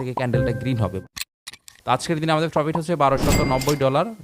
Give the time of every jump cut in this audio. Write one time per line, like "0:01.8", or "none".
0:01.2